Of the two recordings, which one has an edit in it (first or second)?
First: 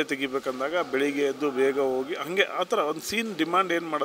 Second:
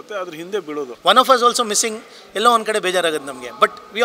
second